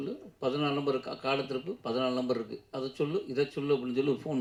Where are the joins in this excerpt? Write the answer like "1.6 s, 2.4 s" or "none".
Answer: none

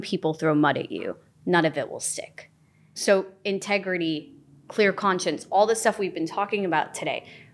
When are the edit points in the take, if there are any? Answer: 3.0 s

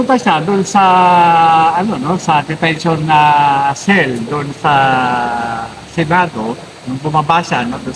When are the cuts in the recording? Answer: none

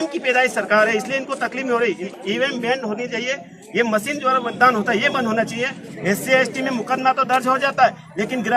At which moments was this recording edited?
2.1 s, 5.9 s

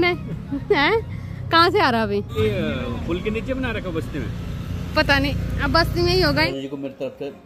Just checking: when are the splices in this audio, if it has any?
2.3 s, 6.5 s

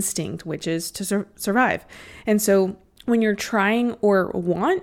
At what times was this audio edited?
2.9 s

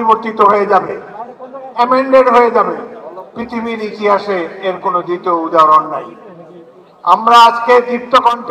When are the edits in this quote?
none

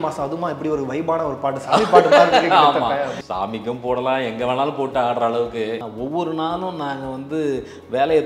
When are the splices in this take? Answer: 3.2 s, 5.8 s

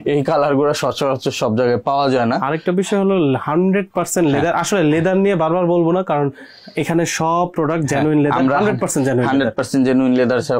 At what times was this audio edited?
none

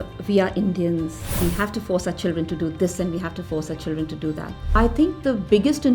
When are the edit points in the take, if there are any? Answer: 1.2 s, 4.7 s

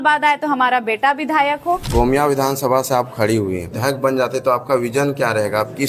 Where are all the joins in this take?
1.9 s, 3.7 s

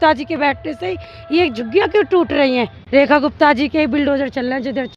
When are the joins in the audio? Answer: 2.5 s

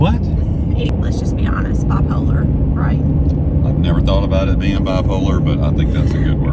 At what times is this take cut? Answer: 0.9 s

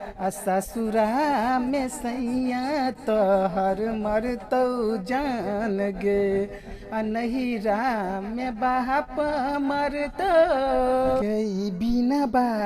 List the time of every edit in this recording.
11.2 s

